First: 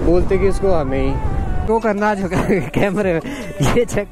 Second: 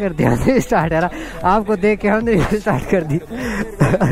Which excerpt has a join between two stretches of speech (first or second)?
first